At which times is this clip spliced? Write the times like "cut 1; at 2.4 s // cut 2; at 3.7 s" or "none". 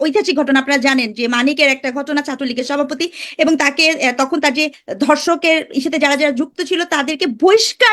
cut 1; at 4.8 s